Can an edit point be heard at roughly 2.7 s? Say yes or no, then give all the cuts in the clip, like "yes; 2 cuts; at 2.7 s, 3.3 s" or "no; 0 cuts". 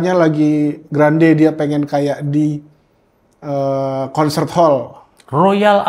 no; 0 cuts